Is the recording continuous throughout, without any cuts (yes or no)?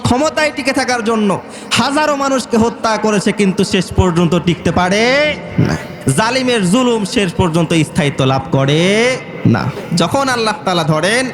no